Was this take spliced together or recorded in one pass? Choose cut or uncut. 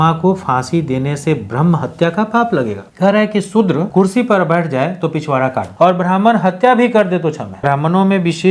cut